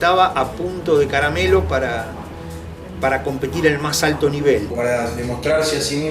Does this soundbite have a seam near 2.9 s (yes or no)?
no